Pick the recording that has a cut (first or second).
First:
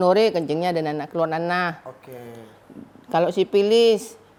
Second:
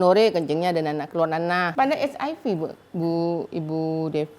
second